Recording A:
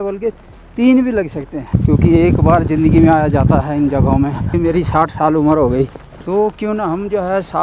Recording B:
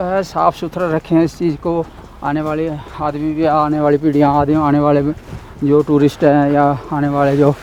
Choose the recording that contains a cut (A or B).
A